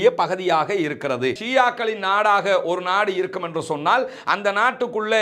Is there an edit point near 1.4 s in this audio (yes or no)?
yes